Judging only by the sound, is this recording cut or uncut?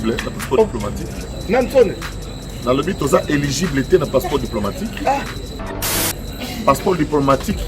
cut